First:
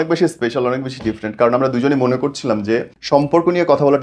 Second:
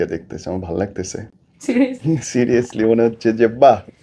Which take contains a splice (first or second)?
first